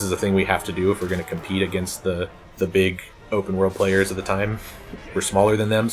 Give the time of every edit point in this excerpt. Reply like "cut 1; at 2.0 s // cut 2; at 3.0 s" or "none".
cut 1; at 2.4 s // cut 2; at 5.0 s